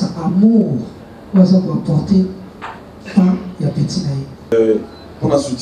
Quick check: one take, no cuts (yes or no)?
no